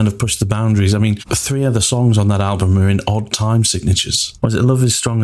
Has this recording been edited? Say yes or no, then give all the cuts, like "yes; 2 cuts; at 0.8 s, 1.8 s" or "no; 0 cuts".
yes; 2 cuts; at 1.3 s, 4.2 s